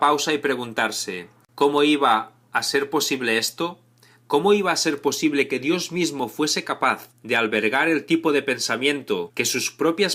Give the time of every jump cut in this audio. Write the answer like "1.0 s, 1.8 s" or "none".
8.8 s